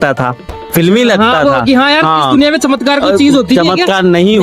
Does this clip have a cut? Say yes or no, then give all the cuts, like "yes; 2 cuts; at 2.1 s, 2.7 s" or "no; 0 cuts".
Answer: no; 0 cuts